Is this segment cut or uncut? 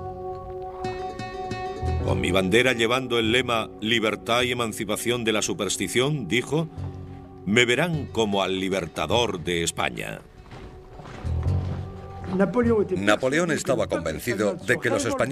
uncut